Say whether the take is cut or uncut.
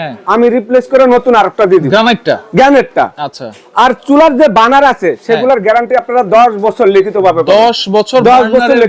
uncut